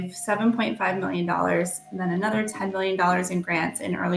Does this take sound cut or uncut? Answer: uncut